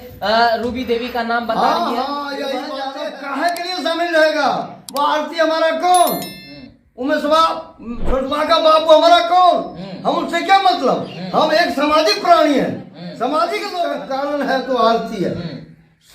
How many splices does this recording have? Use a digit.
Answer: 2